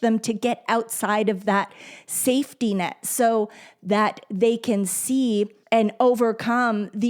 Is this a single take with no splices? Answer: no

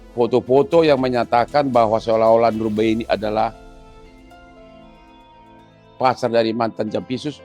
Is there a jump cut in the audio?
yes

